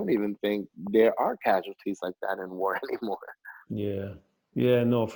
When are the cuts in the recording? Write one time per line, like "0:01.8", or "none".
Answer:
none